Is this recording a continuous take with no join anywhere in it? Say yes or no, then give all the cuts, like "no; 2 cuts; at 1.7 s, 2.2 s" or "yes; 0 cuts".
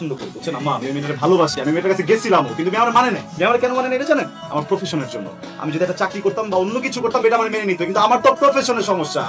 yes; 0 cuts